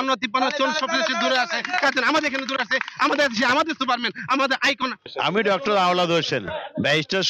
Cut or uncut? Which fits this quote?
cut